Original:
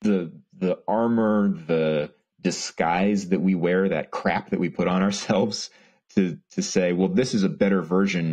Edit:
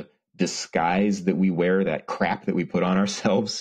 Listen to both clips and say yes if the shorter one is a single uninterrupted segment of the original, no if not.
yes